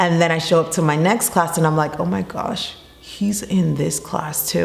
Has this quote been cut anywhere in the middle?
no; 0 cuts

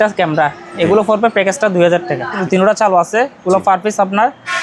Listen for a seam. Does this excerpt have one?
yes; 1 cut; at 2.4 s

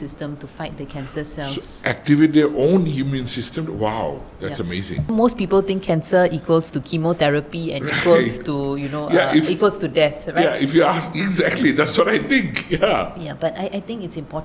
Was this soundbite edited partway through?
yes; 1 cut; at 5.1 s

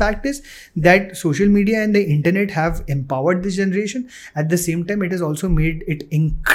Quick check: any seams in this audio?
no; 0 cuts

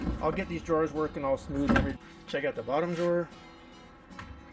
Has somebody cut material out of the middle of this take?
yes; 1 cut; at 2.1 s

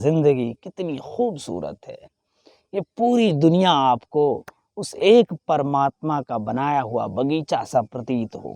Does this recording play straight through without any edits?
yes; 0 cuts

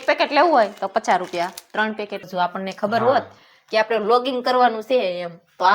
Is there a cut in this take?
yes; 1 cut; at 2.2 s

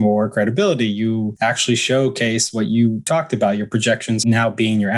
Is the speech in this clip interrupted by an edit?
yes; 3 cuts; at 1.3 s, 3.1 s, 4.2 s

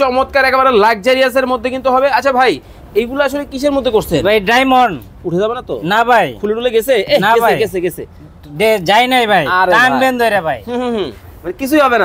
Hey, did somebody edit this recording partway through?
no; 0 cuts

